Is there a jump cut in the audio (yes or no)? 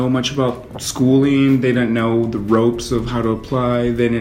no